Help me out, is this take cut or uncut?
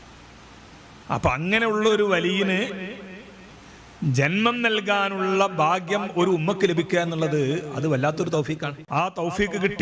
cut